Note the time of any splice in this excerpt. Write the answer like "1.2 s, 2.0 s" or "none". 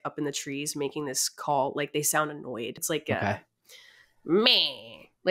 2.8 s